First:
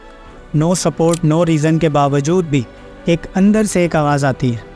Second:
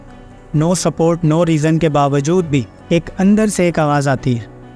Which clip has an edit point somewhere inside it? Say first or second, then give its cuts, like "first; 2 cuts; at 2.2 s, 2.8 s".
second; 1 cut; at 2.7 s